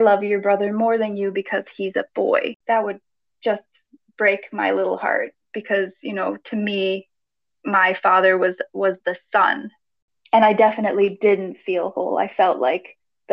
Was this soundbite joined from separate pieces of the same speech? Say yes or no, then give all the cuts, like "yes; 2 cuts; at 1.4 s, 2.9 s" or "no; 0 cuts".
yes; 2 cuts; at 2.6 s, 10.0 s